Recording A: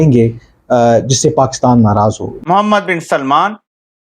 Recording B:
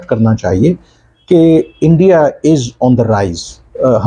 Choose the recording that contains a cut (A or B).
A